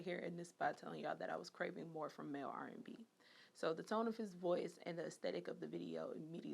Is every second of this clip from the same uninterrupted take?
yes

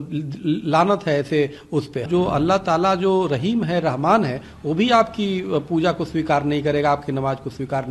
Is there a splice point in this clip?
yes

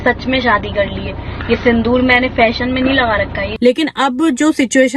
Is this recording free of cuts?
no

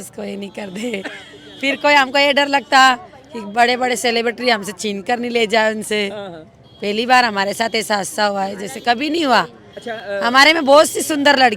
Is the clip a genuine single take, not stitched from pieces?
yes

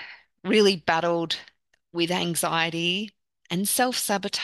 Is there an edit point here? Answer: no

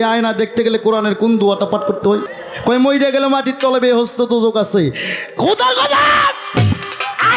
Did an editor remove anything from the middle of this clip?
yes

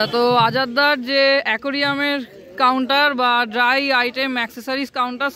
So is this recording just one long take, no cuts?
yes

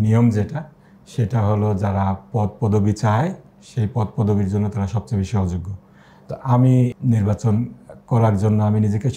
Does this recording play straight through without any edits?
no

